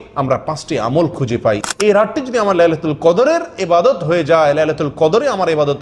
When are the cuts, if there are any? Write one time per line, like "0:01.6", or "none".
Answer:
0:01.7